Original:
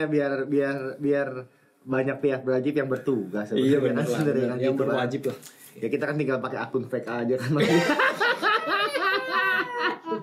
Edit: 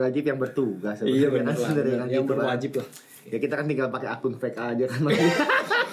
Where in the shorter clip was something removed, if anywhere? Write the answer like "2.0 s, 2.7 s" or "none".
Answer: none

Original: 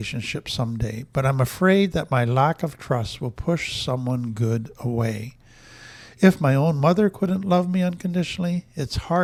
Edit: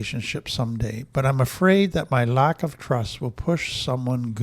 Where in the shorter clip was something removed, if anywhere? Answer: none

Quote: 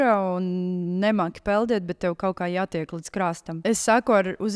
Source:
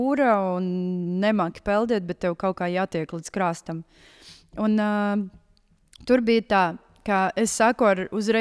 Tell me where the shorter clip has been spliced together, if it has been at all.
3.6 s

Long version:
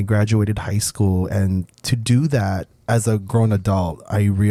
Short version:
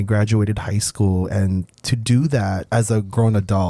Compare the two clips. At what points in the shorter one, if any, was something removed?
2.6 s

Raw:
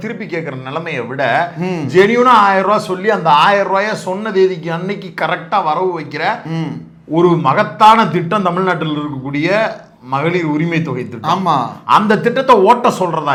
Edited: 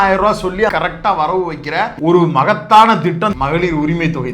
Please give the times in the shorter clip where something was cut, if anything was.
0.7 s, 1.9 s, 3.3 s

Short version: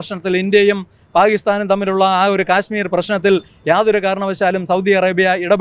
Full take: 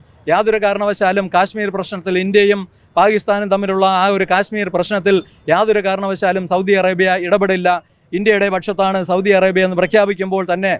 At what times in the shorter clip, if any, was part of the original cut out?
none

